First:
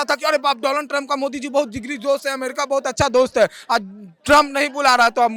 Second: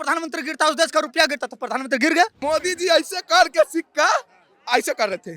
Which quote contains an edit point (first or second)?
second